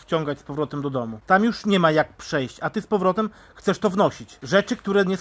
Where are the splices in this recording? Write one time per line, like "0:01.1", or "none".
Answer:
0:01.2
0:04.3